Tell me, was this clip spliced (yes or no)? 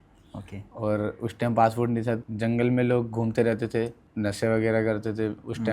yes